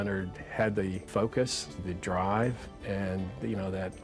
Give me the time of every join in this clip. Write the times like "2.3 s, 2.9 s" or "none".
1.1 s, 1.8 s, 2.7 s